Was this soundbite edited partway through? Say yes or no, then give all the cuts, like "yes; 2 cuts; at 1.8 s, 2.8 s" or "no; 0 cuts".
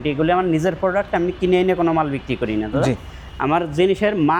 no; 0 cuts